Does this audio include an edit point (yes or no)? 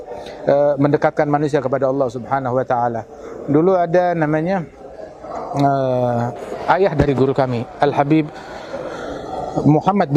no